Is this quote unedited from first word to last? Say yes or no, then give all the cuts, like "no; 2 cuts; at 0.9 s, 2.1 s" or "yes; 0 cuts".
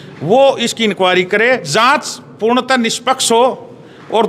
no; 1 cut; at 1.7 s